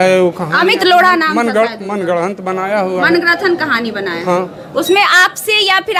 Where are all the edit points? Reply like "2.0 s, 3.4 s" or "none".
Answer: none